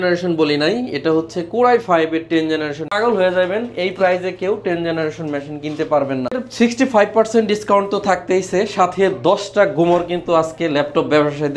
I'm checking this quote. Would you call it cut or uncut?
cut